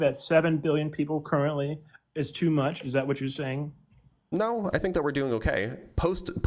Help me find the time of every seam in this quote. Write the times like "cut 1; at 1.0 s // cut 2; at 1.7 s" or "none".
none